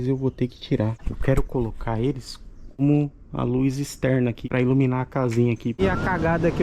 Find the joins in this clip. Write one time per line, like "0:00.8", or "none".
0:01.1
0:02.8
0:04.4
0:05.8